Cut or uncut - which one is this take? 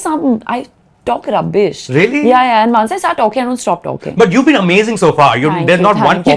uncut